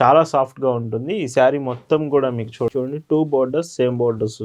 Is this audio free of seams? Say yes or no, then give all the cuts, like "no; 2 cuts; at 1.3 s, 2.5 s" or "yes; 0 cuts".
no; 1 cut; at 2.7 s